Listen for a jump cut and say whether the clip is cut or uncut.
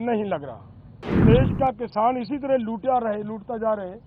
cut